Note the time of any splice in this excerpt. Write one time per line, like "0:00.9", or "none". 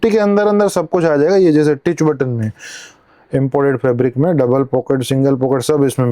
none